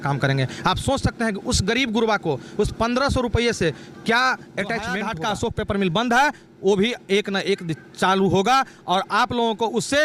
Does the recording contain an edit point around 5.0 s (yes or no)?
yes